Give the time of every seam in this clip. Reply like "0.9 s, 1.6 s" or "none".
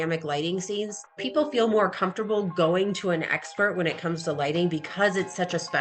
1.1 s